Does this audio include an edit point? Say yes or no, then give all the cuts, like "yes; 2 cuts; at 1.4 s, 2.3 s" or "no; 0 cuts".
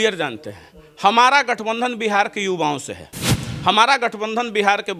no; 0 cuts